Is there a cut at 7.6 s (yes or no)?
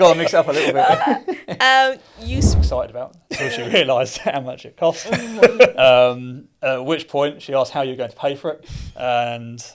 no